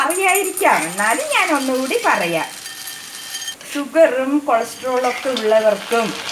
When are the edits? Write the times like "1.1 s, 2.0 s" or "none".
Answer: 3.1 s